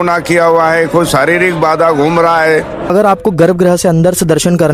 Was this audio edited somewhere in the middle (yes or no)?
yes